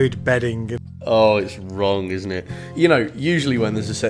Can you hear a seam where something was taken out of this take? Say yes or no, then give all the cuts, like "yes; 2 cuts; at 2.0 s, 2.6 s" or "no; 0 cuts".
yes; 2 cuts; at 0.9 s, 2.6 s